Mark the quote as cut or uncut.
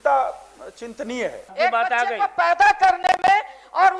cut